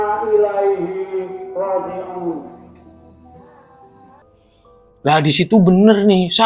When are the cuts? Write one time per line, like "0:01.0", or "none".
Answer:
0:04.1